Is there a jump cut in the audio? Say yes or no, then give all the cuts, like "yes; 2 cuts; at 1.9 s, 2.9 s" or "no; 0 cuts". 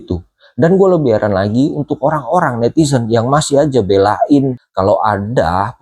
yes; 1 cut; at 4.6 s